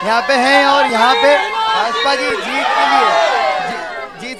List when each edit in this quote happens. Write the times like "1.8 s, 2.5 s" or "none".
none

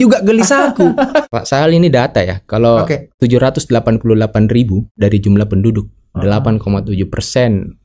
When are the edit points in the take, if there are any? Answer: 1.4 s, 3.1 s, 4.9 s

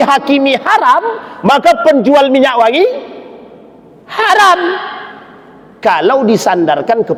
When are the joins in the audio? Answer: none

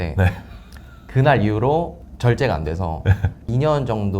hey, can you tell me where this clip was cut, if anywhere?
2.0 s, 3.4 s

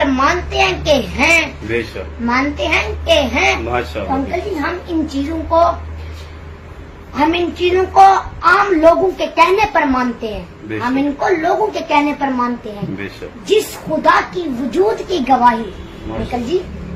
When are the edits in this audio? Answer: none

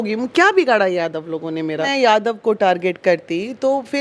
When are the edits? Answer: 1.9 s

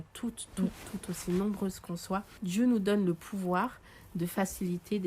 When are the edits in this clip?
2.3 s

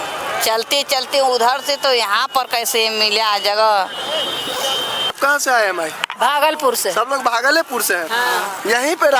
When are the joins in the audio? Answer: 5.2 s

